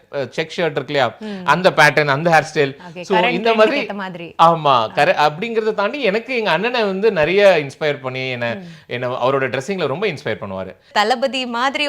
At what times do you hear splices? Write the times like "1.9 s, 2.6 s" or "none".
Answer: 10.9 s